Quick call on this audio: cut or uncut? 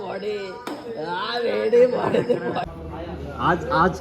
cut